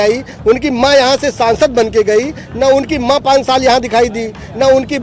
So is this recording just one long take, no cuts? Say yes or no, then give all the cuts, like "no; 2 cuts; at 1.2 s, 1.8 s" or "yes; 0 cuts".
yes; 0 cuts